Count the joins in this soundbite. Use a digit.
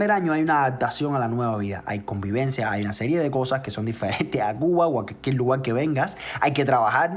0